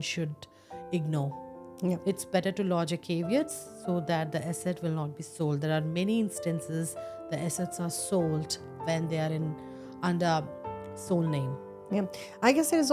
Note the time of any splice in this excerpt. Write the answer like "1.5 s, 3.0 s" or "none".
2.0 s